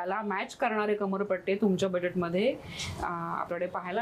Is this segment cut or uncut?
uncut